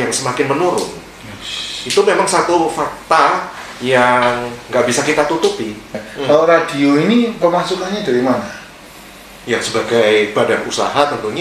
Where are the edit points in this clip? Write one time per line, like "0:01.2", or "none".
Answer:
0:06.0